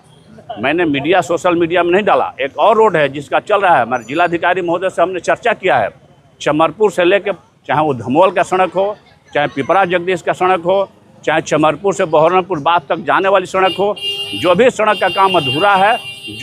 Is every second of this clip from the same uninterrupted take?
no; 1 cut; at 7.3 s

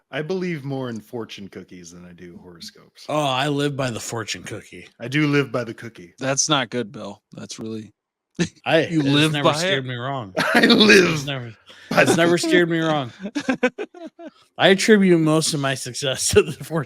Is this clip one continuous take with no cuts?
no; 1 cut; at 8.6 s

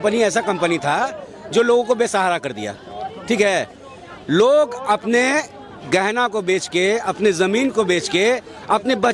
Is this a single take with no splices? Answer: yes; 0 cuts

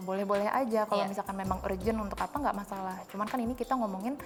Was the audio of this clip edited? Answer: no; 0 cuts

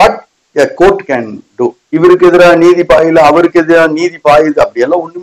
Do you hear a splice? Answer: yes; 1 cut; at 1.8 s

